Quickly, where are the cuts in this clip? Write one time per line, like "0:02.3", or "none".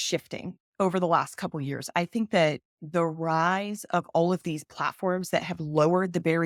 none